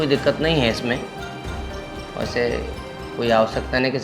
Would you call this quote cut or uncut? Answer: uncut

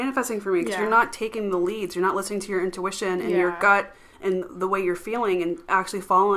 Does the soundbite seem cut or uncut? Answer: uncut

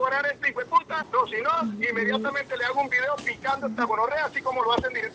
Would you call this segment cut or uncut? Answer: cut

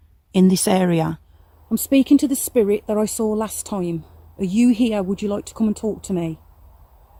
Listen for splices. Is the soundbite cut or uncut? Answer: uncut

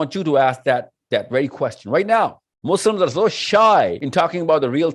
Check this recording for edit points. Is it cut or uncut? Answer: cut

